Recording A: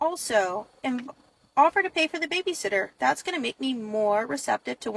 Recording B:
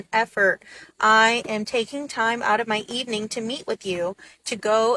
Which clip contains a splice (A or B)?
A